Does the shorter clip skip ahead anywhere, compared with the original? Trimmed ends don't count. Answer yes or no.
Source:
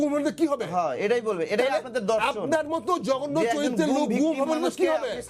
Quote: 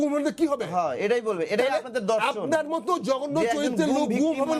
no